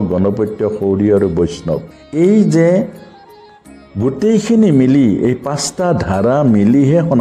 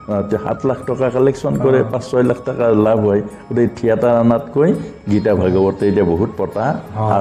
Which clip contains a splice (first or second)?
first